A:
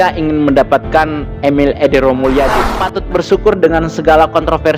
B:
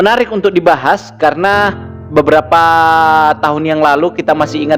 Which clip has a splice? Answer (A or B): A